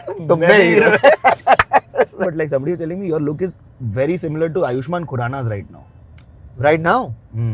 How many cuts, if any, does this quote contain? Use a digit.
1